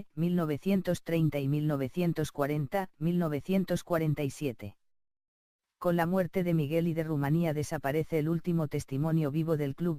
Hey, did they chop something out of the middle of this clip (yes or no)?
no